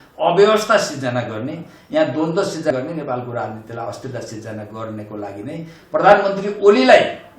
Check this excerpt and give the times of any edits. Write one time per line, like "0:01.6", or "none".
0:02.7